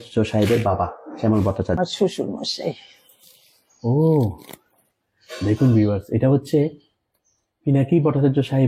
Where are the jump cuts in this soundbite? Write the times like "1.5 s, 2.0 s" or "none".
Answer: 1.8 s